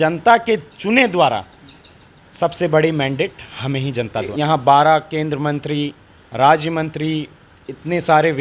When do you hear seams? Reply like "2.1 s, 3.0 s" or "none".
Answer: 4.3 s